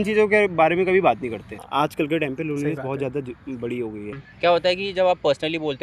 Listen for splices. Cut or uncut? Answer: cut